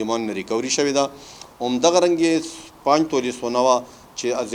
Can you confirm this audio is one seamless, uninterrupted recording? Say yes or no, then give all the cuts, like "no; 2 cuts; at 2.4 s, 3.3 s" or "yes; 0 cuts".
yes; 0 cuts